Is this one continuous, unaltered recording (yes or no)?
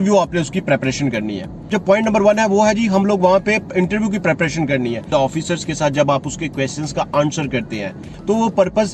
no